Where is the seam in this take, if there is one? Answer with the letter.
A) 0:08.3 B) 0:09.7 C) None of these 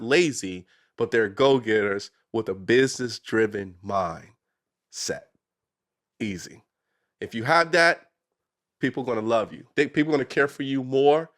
B